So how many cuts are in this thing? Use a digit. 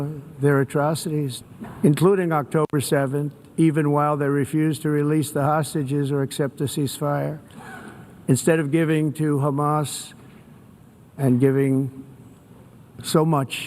1